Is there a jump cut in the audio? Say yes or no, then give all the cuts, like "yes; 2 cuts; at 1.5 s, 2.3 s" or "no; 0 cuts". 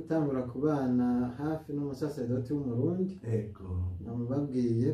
no; 0 cuts